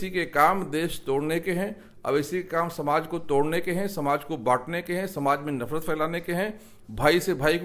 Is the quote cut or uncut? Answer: uncut